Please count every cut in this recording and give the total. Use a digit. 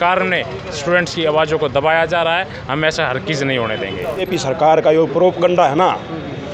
1